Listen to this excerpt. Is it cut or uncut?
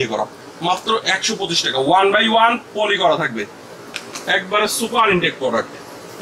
uncut